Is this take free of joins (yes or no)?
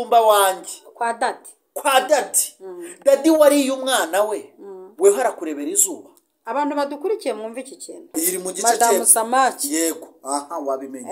no